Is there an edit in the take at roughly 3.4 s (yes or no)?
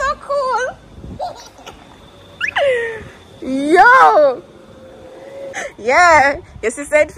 no